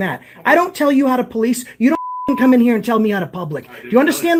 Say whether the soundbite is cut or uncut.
uncut